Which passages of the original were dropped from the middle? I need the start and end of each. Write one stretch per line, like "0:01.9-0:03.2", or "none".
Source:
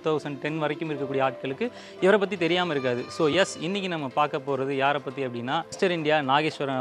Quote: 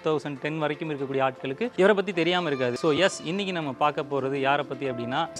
0:01.7-0:02.0
0:03.0-0:03.1